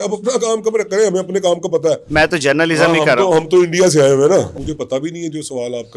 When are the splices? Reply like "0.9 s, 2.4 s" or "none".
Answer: 2.0 s, 4.6 s

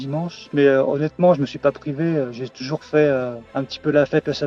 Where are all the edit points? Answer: none

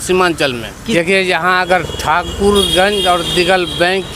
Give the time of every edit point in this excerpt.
0.9 s

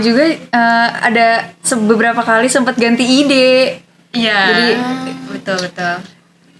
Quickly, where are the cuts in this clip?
none

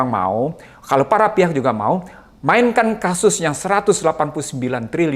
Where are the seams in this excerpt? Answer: none

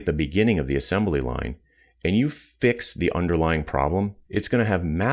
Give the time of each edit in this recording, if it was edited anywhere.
4.2 s

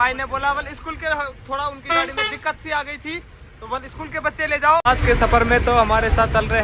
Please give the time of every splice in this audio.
4.8 s

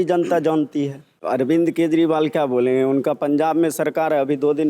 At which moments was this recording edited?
1.1 s

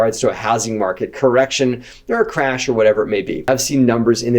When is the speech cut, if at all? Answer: 3.5 s

